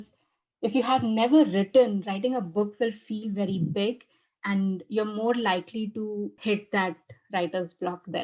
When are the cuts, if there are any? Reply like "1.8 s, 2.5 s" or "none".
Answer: 6.3 s

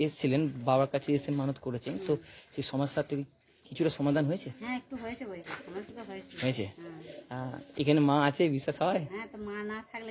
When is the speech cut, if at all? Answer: none

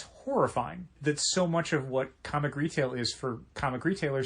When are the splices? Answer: 1.0 s

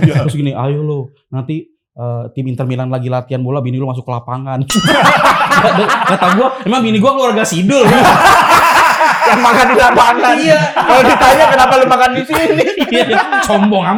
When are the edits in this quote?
none

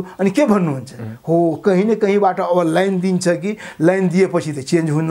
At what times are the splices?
none

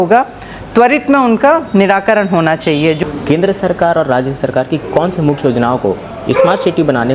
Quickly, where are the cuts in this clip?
3.0 s

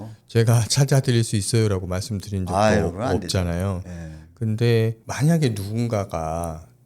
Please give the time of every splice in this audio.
5.0 s

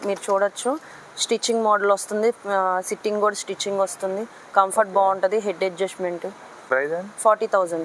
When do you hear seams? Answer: none

